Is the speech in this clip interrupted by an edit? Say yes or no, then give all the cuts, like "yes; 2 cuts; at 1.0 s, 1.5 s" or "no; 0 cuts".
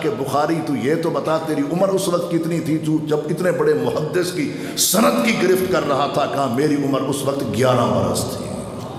no; 0 cuts